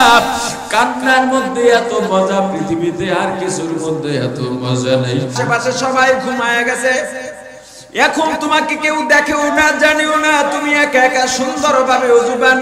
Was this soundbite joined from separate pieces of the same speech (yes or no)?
yes